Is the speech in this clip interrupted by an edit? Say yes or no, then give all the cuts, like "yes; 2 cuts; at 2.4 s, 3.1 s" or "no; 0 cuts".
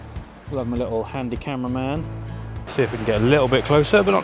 yes; 1 cut; at 2.6 s